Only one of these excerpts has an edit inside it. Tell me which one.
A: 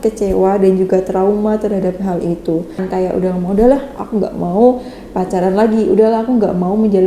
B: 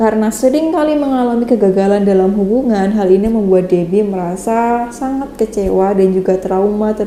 A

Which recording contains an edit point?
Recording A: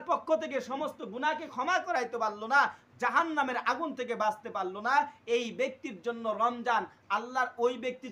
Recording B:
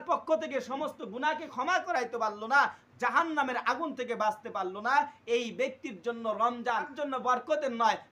B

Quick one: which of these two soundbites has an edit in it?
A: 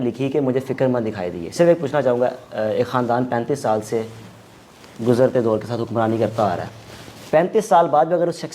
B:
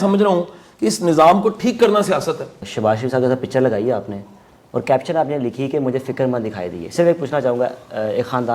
B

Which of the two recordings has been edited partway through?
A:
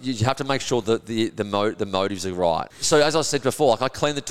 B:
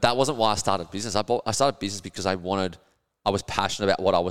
A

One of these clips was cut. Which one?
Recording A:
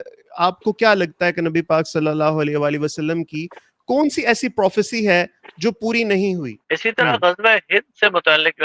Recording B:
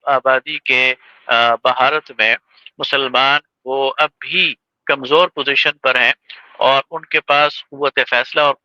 A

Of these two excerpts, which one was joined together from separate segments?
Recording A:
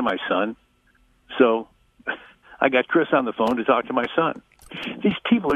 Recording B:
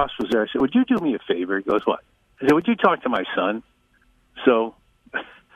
A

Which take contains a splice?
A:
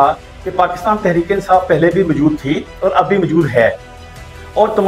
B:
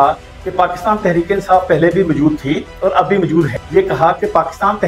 B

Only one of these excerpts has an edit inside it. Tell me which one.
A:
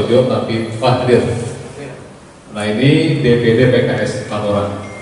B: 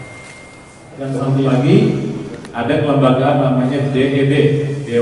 B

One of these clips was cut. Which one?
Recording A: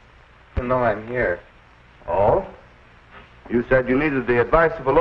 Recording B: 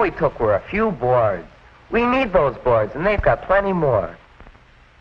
A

